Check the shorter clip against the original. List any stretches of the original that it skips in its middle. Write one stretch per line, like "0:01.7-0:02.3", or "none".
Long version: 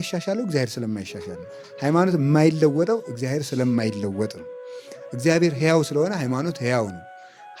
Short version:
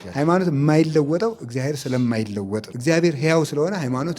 0:04.4-0:05.1